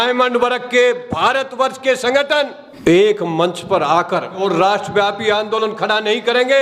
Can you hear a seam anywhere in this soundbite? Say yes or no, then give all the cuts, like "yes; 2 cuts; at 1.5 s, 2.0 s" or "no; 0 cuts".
yes; 1 cut; at 4.4 s